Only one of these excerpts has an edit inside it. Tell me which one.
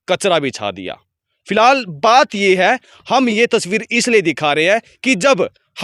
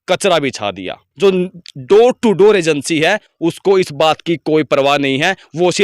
second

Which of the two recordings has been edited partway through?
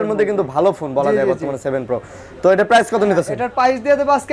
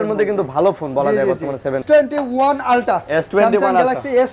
second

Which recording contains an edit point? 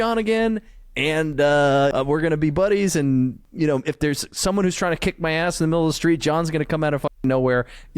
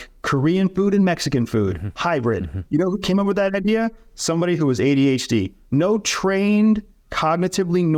first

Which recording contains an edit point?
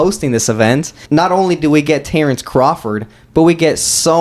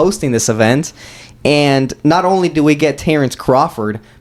first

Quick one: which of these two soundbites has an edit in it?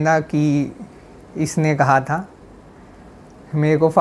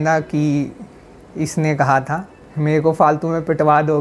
second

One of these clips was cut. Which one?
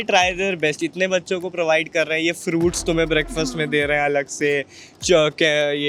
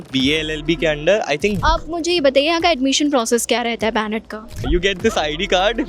second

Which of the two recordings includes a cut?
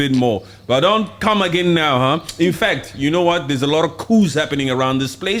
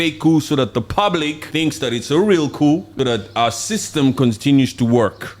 second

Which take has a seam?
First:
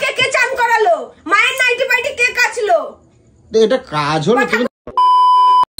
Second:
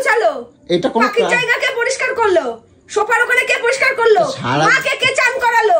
first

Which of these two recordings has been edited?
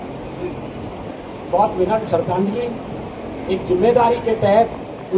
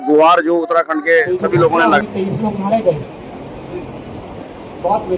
second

